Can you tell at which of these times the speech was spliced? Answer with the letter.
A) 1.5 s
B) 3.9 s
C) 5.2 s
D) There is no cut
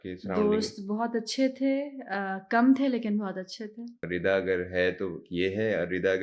B